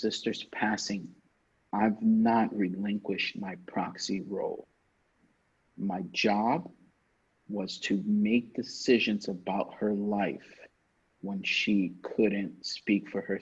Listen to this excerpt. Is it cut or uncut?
uncut